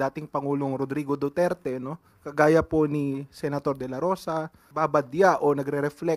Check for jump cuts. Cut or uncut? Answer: cut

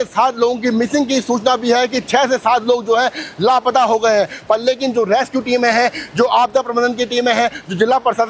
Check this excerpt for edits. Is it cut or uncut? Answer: uncut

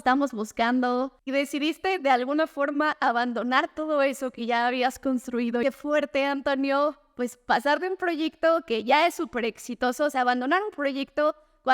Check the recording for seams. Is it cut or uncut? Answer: cut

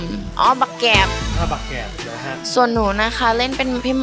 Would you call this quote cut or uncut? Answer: uncut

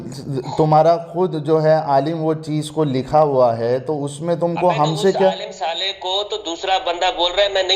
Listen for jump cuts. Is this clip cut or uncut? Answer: uncut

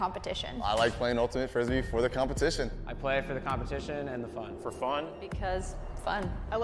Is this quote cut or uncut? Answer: uncut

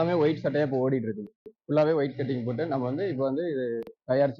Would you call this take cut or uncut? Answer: uncut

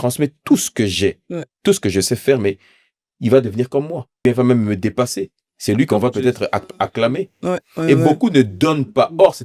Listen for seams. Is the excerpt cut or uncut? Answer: cut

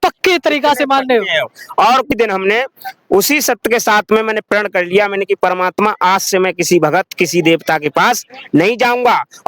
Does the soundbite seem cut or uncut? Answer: cut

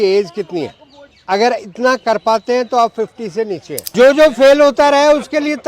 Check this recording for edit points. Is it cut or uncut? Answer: cut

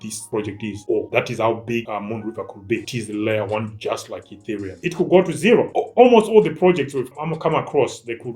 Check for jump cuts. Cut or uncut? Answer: cut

